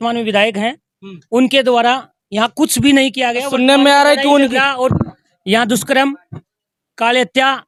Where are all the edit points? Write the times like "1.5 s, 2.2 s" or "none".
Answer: none